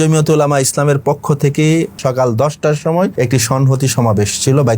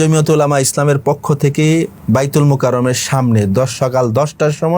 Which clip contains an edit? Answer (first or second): first